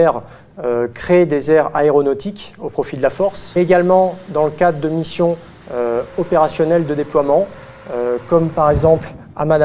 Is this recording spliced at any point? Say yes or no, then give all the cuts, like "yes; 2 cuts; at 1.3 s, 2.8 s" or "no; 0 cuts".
yes; 1 cut; at 1.5 s